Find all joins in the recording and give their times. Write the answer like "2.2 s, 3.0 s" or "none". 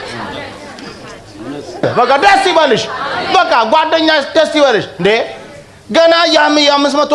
1.9 s

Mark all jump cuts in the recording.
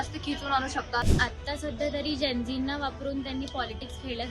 1.1 s

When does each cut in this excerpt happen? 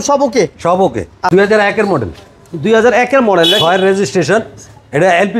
1.3 s

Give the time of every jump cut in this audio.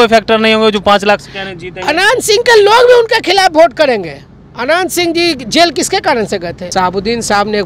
6.6 s

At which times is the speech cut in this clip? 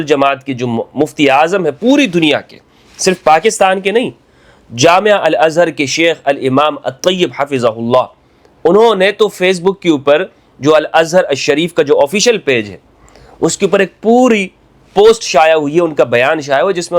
none

